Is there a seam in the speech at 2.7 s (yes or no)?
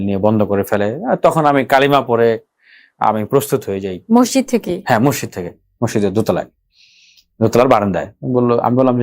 no